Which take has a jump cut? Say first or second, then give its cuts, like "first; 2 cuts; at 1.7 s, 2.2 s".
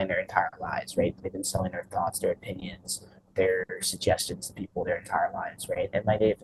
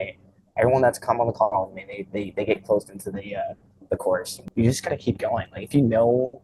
second; 1 cut; at 4.4 s